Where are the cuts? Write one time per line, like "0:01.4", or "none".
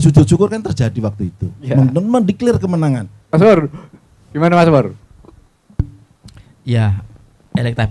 none